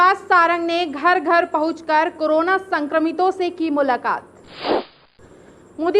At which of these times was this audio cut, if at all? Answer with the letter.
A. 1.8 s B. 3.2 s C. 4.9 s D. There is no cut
C